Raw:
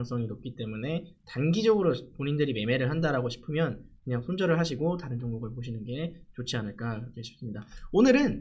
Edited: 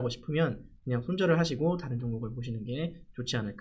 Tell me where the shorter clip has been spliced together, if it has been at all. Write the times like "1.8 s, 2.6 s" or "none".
none